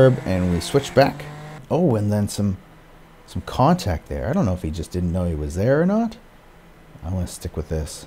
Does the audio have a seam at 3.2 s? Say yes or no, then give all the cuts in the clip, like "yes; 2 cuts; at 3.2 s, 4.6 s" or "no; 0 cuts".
no; 1 cut; at 1.6 s